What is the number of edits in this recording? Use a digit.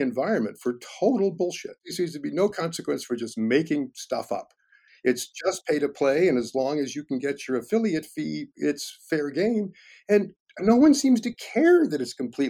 1